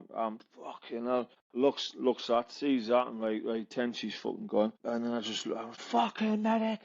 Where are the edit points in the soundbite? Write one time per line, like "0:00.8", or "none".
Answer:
0:01.4
0:05.4